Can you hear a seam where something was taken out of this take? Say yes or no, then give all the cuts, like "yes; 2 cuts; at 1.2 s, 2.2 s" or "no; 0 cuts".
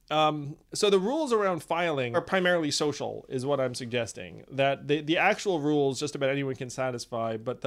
yes; 1 cut; at 2.2 s